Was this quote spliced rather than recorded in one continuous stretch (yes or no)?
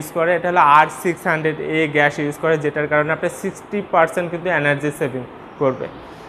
no